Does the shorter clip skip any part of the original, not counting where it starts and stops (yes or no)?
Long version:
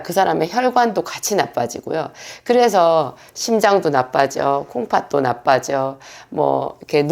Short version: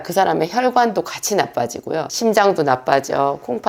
yes